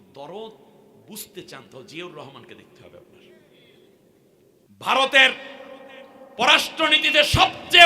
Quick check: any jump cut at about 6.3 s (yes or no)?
no